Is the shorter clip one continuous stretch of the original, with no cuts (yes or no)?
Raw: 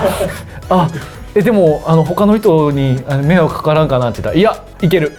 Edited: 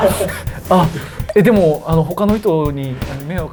yes